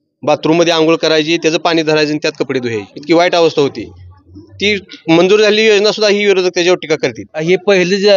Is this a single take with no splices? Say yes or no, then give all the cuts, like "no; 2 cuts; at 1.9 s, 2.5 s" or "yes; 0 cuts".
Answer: no; 2 cuts; at 2.9 s, 7.3 s